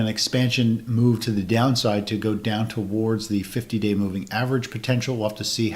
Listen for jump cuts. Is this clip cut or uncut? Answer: uncut